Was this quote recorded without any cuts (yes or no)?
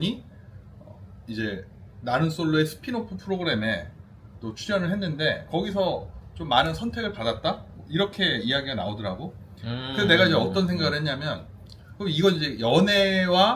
yes